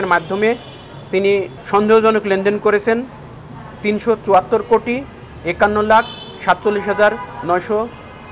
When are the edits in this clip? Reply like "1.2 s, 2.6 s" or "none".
1.6 s